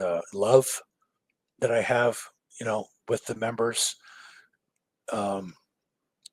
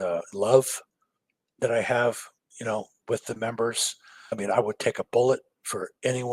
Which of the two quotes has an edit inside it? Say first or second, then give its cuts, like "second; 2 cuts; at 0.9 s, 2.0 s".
second; 1 cut; at 4.3 s